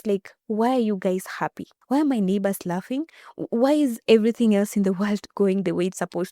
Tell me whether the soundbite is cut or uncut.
cut